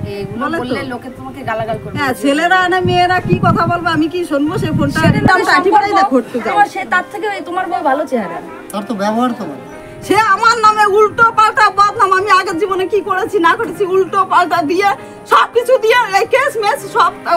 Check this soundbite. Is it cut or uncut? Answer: cut